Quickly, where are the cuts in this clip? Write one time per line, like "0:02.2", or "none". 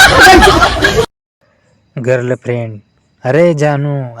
0:01.2